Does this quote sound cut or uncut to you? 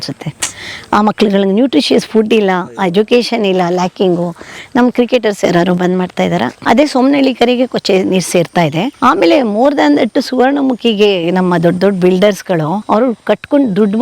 cut